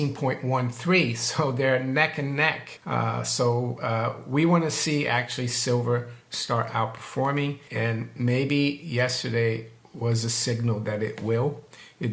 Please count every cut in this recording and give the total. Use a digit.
2